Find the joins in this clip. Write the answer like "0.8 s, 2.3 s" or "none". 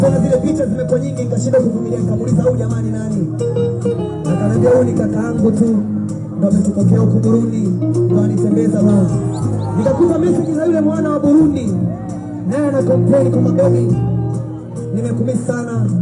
none